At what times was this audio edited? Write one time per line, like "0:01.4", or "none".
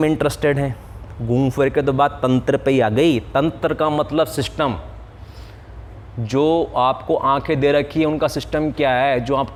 none